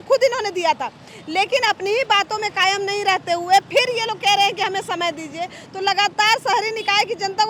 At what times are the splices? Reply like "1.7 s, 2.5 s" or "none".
none

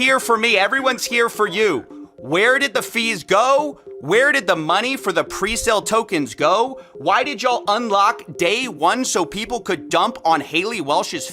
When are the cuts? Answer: 1.9 s

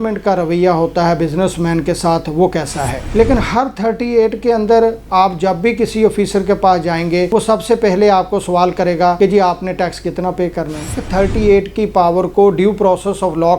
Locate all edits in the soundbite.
3.0 s, 11.0 s

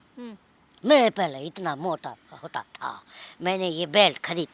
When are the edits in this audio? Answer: none

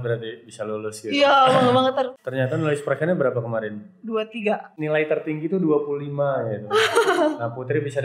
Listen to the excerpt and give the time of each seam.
2.1 s, 4.7 s

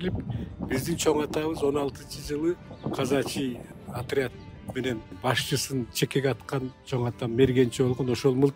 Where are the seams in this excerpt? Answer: 2.7 s, 3.7 s, 5.1 s

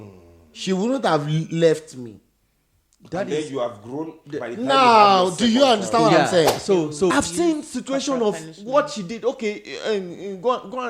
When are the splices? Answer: 6.9 s

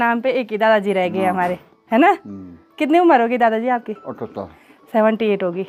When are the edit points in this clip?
none

